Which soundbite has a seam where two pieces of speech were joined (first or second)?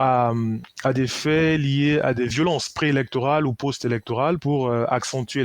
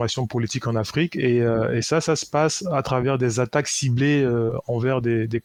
first